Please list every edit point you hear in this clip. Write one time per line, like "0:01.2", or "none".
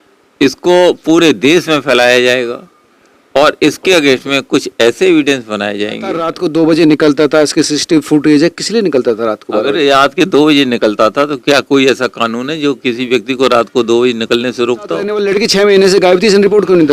0:06.3
0:15.2